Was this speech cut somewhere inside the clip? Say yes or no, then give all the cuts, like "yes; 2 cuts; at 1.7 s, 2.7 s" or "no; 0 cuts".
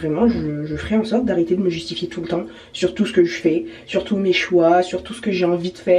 no; 0 cuts